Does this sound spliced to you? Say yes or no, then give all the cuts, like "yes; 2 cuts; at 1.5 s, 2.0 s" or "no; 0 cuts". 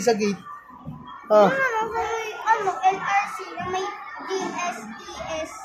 no; 0 cuts